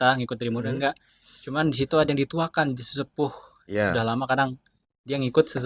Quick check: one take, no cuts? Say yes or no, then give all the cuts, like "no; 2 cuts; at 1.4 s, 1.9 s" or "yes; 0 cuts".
yes; 0 cuts